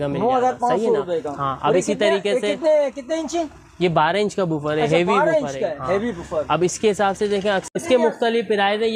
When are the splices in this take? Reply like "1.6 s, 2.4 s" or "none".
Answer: 7.7 s

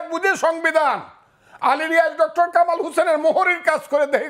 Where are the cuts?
none

